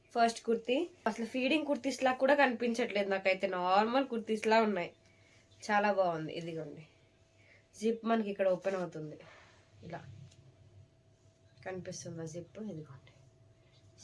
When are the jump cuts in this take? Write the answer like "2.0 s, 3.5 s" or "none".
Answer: 1.1 s